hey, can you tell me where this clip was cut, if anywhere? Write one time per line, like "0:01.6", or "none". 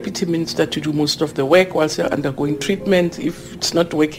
none